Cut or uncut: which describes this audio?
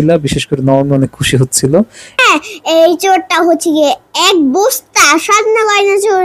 cut